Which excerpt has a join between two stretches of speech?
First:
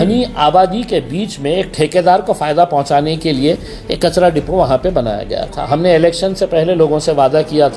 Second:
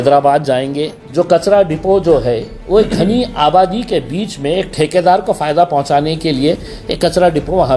second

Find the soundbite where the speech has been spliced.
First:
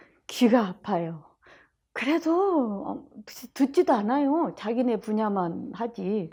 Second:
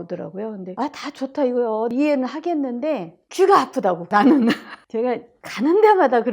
second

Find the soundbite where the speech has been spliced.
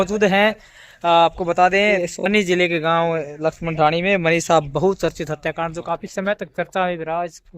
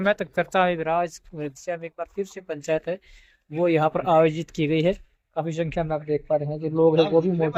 first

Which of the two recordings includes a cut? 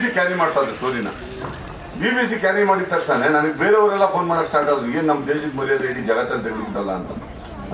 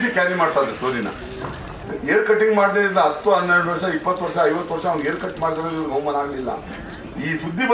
second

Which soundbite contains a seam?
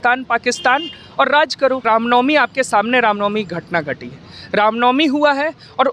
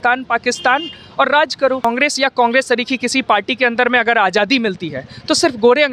second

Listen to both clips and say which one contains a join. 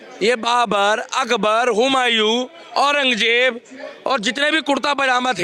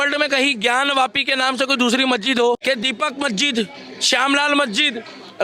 second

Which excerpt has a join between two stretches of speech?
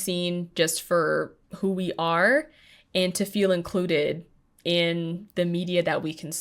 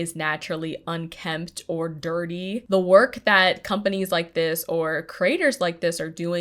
second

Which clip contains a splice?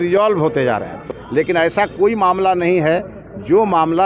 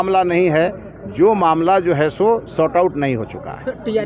first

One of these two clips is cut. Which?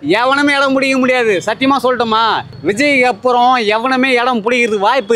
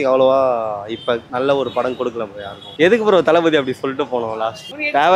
first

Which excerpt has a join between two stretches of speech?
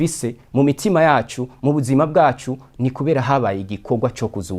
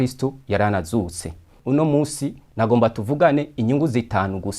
second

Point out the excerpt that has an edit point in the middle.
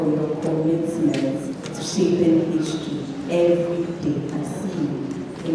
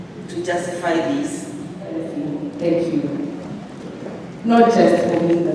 second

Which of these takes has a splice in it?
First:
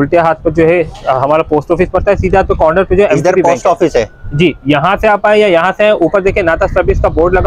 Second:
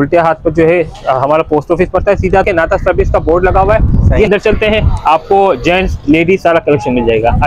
second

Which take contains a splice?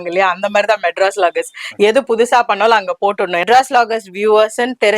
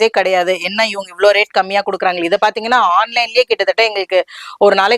first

